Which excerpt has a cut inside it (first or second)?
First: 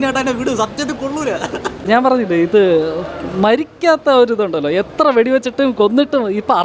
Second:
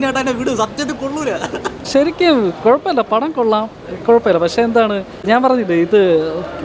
first